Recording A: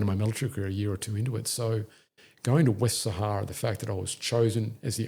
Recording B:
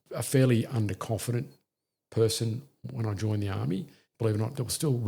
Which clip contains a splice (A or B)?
B